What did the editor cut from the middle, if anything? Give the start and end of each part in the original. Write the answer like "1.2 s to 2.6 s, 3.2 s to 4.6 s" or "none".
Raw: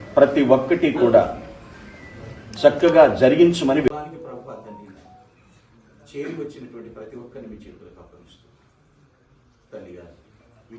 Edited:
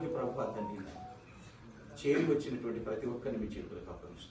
none

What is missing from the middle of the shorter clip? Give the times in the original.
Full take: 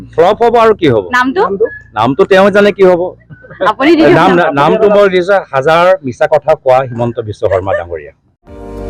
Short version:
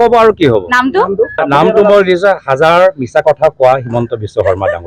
1.8 s to 4.5 s

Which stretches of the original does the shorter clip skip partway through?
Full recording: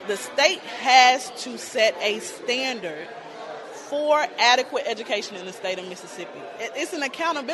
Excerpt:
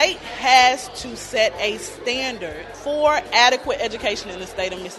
3.1 s to 3.7 s

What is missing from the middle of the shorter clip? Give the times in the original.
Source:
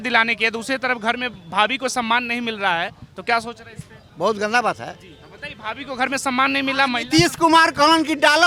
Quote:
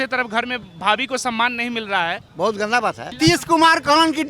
3.0 s to 4.1 s, 4.9 s to 7.0 s

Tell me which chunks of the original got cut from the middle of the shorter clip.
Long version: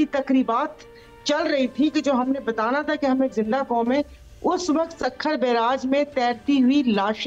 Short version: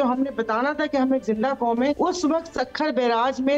4.1 s to 4.4 s

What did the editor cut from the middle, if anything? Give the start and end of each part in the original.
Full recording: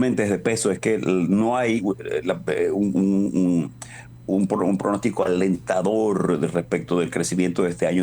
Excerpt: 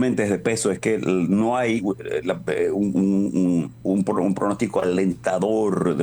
3.7 s to 4.2 s

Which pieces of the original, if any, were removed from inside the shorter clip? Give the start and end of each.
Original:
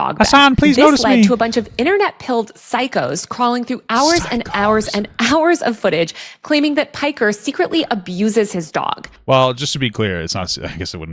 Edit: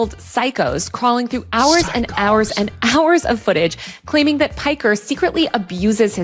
none

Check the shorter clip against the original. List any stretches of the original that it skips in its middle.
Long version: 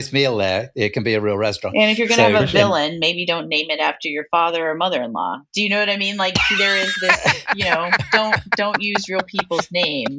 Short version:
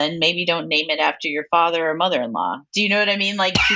none

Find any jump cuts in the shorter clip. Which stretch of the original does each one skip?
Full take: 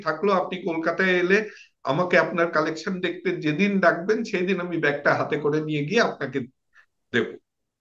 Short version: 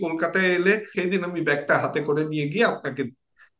1.6 s to 4.3 s

